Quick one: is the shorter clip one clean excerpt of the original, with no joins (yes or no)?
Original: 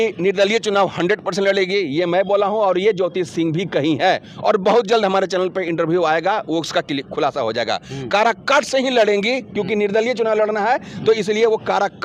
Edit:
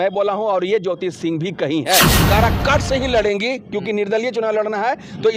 no